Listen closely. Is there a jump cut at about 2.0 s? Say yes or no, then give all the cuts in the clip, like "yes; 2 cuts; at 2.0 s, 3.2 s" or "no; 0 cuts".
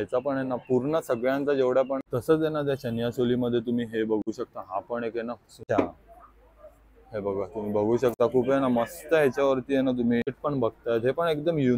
yes; 3 cuts; at 2.0 s, 5.6 s, 10.4 s